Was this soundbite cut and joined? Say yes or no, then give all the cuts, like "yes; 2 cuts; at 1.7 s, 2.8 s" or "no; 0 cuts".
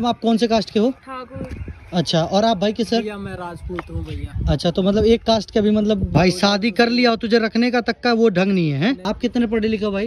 yes; 2 cuts; at 6.1 s, 9.0 s